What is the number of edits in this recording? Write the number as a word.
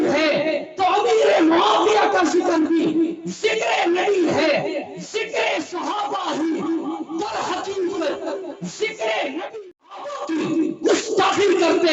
one